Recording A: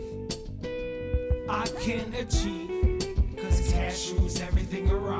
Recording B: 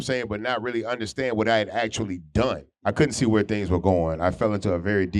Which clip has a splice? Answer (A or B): B